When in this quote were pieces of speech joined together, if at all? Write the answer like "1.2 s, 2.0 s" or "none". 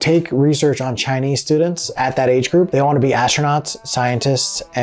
2.7 s